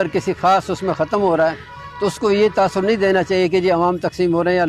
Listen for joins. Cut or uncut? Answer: uncut